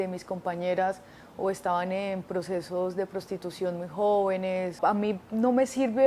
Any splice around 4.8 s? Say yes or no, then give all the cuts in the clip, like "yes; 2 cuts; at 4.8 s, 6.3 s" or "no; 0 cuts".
yes; 1 cut; at 4.8 s